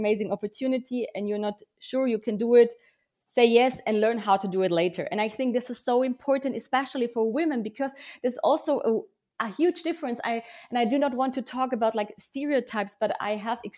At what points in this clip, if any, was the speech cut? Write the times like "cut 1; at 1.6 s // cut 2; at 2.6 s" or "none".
none